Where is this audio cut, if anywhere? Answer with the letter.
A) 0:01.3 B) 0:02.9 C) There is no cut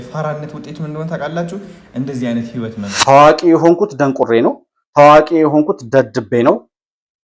B